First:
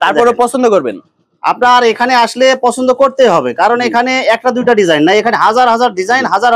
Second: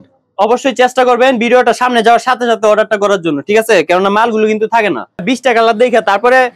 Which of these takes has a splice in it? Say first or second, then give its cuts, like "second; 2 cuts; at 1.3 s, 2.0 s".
second; 1 cut; at 5.2 s